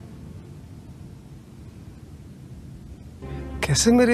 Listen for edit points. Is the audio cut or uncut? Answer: uncut